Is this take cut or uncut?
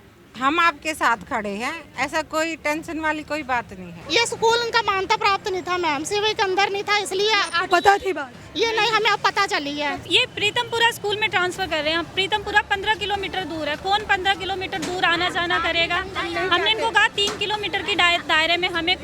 cut